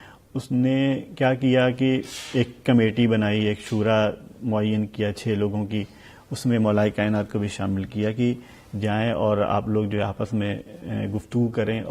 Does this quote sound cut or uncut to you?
uncut